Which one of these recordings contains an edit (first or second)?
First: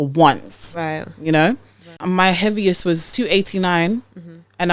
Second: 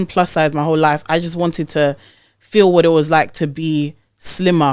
first